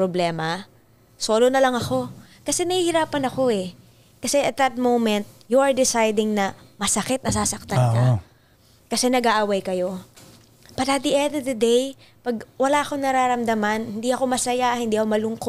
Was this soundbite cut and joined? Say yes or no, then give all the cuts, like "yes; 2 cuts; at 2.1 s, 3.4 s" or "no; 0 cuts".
no; 0 cuts